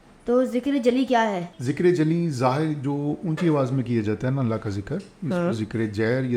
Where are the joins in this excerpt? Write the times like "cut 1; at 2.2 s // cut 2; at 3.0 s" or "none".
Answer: cut 1; at 1.5 s